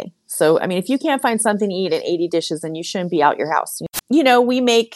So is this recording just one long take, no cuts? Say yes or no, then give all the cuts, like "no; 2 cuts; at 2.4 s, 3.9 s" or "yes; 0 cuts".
no; 1 cut; at 3.7 s